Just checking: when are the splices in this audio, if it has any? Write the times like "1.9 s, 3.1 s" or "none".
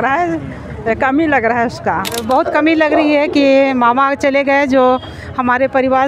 2.2 s